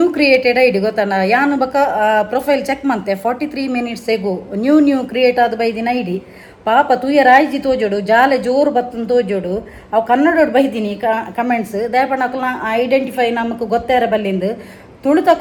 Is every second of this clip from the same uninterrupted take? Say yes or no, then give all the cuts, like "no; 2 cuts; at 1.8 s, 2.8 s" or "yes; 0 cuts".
yes; 0 cuts